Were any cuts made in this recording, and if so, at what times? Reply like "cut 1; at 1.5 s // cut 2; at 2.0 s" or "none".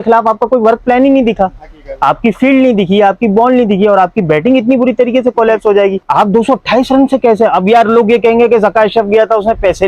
cut 1; at 6.0 s

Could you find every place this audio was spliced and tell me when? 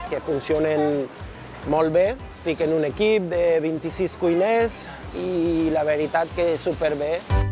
none

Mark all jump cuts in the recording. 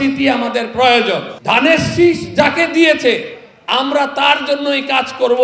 cut 1; at 1.3 s

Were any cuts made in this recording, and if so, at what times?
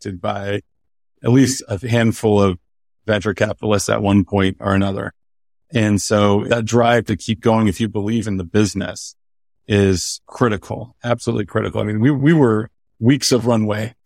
cut 1; at 6.5 s // cut 2; at 10.2 s

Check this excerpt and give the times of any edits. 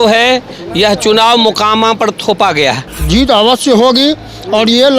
cut 1; at 2.9 s

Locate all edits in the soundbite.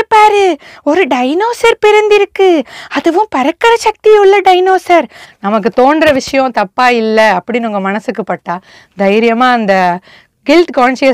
cut 1; at 5.2 s

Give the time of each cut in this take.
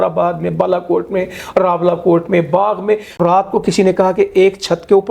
cut 1; at 3.2 s

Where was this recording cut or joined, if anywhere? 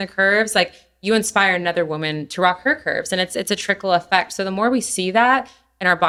none

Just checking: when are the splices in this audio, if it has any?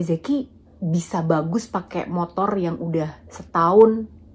none

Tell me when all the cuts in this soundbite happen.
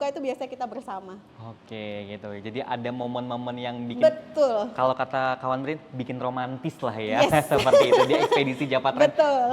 none

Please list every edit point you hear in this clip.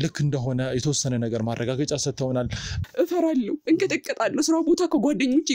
cut 1; at 2.8 s

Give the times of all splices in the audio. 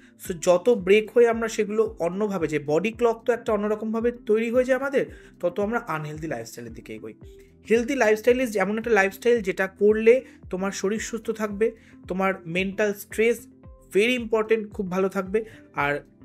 none

